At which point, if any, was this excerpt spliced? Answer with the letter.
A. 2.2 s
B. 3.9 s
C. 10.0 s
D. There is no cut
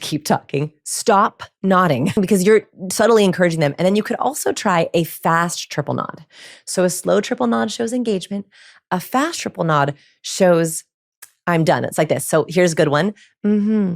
A